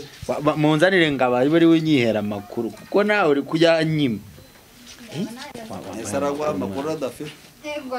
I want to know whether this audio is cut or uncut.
uncut